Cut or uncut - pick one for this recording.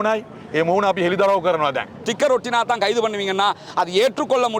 cut